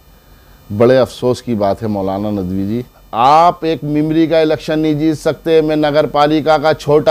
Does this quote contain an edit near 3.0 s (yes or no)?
yes